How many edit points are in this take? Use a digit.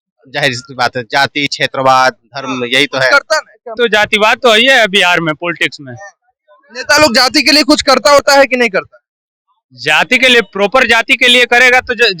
1